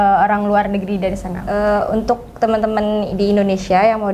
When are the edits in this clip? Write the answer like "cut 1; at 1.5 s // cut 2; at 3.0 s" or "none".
cut 1; at 1.3 s